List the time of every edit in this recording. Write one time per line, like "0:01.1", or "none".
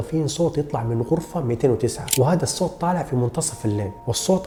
none